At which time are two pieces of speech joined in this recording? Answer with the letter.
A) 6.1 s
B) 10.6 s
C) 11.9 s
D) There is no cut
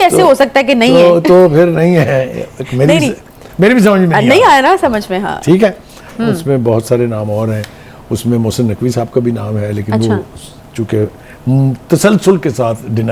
A